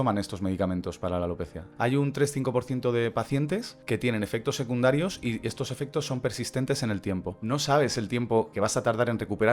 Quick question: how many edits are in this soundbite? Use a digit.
2